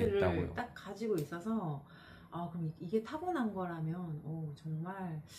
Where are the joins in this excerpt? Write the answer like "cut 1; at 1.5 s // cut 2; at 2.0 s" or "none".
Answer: none

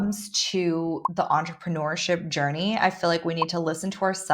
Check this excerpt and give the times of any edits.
cut 1; at 1.0 s

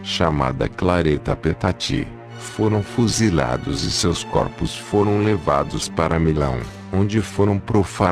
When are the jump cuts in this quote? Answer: none

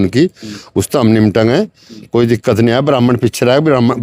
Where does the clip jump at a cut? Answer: none

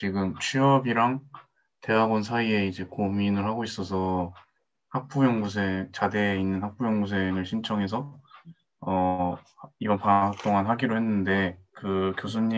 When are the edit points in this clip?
cut 1; at 11.7 s

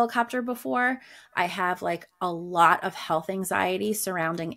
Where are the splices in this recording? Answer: none

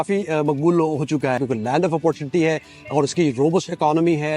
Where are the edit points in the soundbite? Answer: cut 1; at 1.4 s

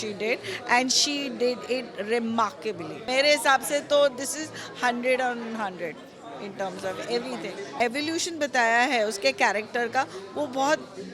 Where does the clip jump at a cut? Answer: cut 1; at 3.1 s // cut 2; at 7.7 s

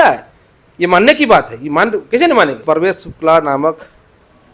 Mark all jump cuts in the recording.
cut 1; at 2.6 s

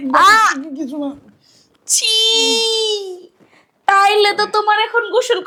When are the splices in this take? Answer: none

